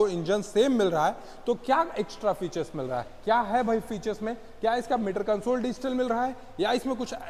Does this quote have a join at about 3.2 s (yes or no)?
no